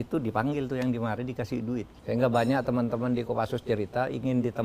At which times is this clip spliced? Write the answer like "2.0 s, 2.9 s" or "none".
1.9 s